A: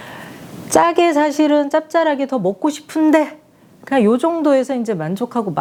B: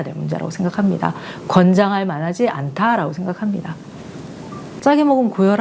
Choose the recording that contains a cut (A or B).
B